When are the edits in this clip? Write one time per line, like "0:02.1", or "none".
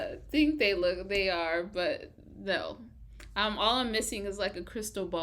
none